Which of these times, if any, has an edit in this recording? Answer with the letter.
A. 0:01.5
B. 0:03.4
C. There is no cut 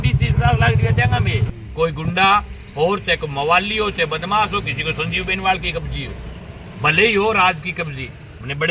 A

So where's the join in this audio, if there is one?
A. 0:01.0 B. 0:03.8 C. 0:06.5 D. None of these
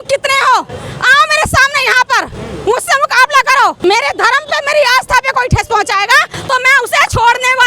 B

